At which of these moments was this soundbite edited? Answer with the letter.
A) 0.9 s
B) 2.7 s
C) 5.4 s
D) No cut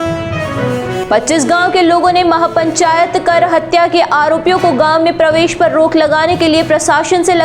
A